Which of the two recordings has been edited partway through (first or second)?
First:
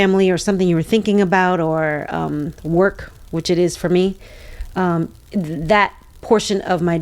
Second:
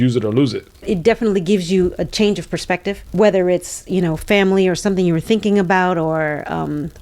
second